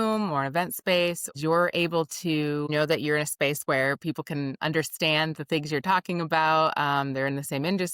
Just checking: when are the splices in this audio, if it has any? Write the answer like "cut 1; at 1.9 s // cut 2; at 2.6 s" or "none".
cut 1; at 1.3 s // cut 2; at 2.7 s